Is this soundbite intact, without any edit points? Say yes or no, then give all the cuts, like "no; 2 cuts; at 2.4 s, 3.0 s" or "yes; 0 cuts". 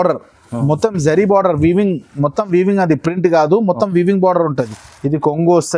no; 1 cut; at 4.8 s